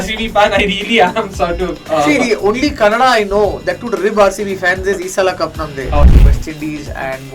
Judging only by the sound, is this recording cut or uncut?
cut